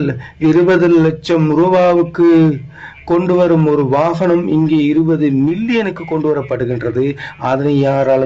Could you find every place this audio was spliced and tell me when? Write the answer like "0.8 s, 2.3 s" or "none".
none